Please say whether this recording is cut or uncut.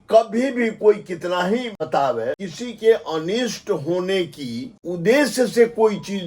cut